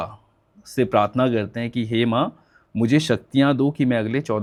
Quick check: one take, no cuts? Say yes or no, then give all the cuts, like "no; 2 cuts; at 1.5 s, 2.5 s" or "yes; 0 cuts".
yes; 0 cuts